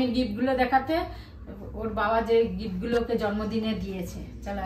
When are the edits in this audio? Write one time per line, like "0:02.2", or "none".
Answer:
none